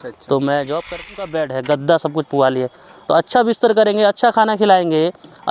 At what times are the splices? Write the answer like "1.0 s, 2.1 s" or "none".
1.2 s